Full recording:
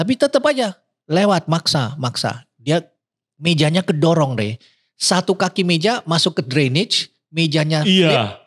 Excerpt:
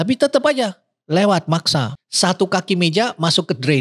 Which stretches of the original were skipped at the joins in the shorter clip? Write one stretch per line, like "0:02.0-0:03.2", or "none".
0:02.0-0:04.9